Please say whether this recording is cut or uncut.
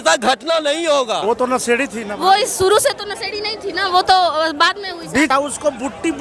cut